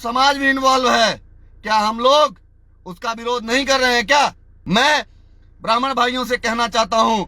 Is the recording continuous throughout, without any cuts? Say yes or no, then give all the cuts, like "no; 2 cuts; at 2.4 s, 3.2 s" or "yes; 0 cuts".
no; 1 cut; at 4.5 s